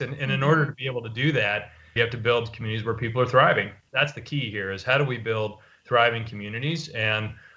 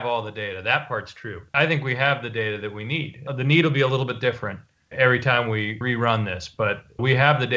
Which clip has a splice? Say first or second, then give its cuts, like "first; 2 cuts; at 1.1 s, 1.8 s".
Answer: second; 1 cut; at 5.8 s